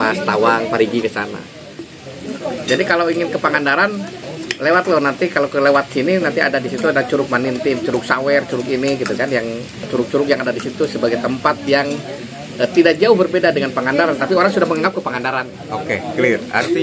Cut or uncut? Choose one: cut